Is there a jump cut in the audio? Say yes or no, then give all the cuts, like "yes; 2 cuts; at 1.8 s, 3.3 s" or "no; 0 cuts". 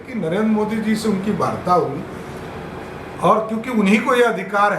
no; 0 cuts